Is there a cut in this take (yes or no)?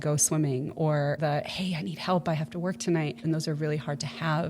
yes